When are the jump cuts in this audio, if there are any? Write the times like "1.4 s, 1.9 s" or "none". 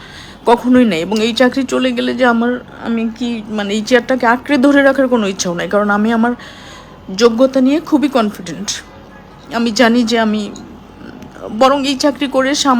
none